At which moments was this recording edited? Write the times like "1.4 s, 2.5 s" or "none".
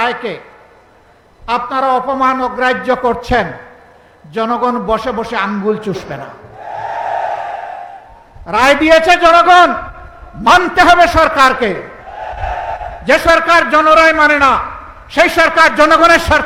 none